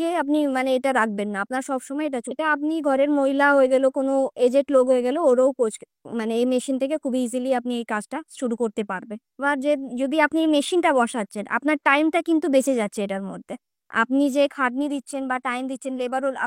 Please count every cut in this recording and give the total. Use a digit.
2